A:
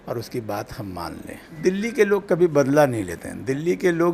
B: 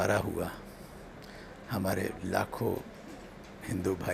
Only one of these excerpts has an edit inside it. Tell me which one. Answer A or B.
A